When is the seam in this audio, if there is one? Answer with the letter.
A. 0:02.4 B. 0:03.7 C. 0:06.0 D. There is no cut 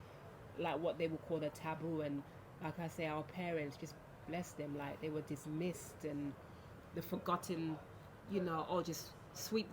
D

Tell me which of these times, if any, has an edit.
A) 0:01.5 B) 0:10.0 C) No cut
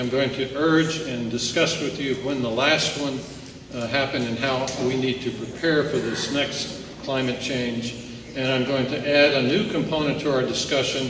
B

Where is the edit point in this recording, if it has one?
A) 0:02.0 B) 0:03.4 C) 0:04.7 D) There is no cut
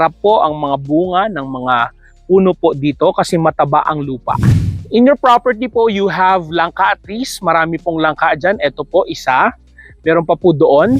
C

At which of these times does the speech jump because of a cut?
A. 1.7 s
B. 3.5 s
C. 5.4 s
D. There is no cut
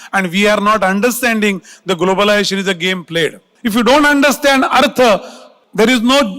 B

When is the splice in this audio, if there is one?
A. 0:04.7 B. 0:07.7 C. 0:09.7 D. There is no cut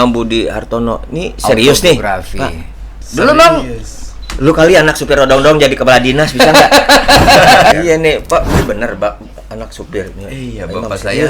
B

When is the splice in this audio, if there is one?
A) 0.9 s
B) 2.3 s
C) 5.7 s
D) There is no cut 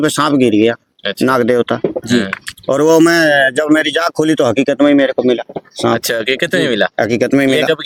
D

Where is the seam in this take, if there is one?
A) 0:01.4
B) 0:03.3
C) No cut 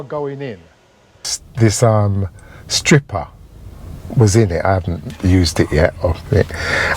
A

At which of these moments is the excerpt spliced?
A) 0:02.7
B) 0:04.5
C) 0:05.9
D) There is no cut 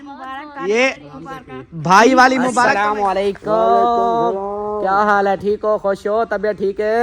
A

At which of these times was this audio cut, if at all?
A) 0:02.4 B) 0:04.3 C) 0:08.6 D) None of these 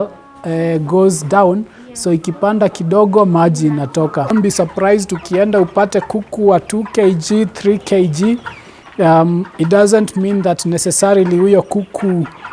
B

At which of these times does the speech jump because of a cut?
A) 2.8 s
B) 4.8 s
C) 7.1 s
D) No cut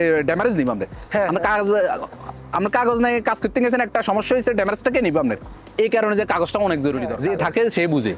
C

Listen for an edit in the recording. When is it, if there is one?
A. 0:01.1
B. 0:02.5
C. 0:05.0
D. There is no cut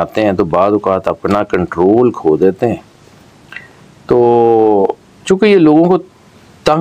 D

